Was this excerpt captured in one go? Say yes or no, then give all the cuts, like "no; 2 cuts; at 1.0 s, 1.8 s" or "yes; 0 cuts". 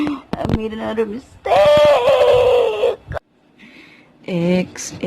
no; 1 cut; at 3.0 s